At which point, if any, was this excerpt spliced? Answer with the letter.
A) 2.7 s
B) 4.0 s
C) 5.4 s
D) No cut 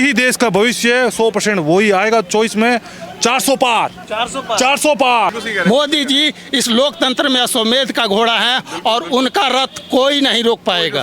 C